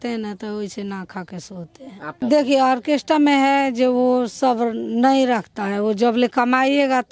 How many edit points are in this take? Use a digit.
1